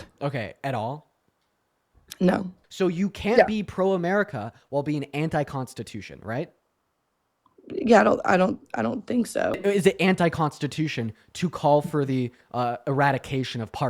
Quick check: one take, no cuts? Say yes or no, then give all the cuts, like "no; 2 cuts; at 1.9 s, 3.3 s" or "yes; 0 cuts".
no; 2 cuts; at 2.6 s, 9.6 s